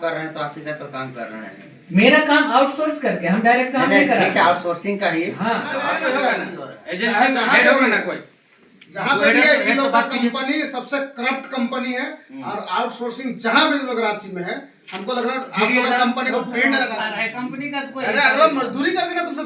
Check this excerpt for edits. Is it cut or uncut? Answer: cut